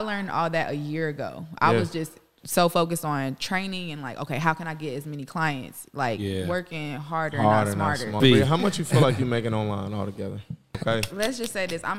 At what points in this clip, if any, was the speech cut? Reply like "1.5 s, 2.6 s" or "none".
8.1 s, 10.8 s